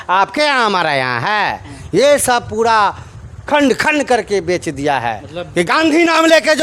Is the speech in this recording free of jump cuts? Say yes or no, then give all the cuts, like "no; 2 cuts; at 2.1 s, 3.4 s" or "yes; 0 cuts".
no; 1 cut; at 5.3 s